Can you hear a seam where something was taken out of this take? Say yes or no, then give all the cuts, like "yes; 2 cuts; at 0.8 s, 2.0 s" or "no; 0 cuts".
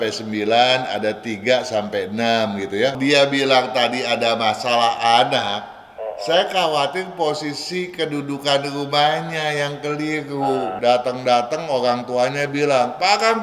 yes; 2 cuts; at 2.9 s, 10.7 s